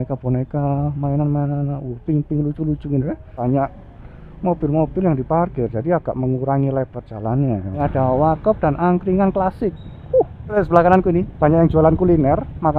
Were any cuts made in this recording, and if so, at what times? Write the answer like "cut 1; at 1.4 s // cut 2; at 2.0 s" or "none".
cut 1; at 3.4 s // cut 2; at 7.8 s // cut 3; at 10.6 s